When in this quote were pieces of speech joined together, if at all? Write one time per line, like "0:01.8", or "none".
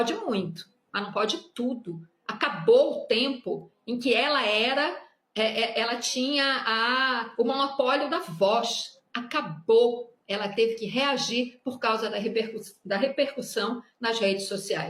none